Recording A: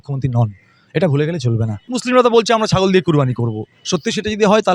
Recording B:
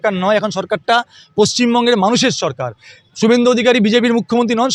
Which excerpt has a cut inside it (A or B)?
A